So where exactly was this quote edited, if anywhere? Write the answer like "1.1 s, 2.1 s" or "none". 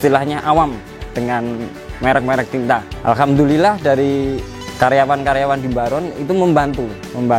none